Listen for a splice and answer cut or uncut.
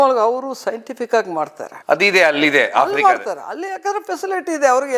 uncut